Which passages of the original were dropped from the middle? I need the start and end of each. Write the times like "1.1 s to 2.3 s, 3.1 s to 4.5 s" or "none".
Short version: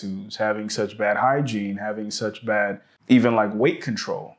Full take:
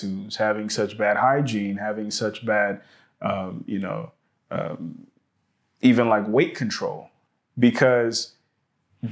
2.9 s to 5.6 s